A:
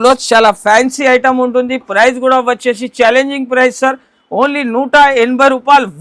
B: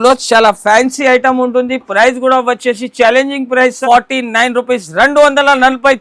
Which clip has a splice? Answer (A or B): B